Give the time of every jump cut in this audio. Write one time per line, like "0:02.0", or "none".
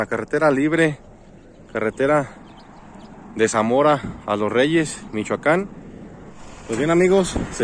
0:06.5